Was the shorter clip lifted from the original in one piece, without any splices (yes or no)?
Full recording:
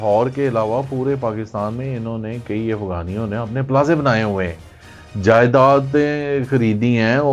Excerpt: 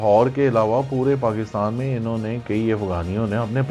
yes